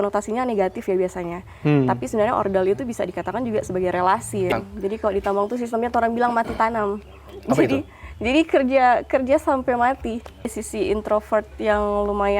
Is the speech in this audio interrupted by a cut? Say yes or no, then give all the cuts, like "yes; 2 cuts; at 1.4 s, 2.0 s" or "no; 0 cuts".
yes; 2 cuts; at 4.5 s, 10.6 s